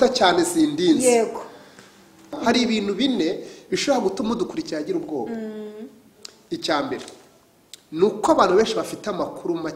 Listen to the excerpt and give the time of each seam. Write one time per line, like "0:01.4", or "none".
0:02.4